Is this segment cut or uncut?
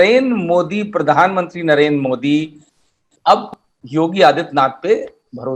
uncut